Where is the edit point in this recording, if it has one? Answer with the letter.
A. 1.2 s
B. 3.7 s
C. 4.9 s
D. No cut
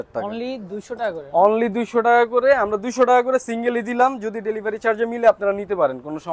D